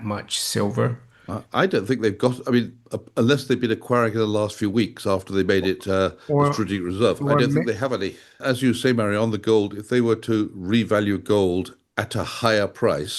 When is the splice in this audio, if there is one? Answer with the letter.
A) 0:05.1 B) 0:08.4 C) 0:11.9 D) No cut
B